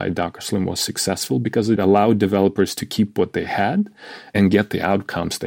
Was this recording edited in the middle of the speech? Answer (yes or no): yes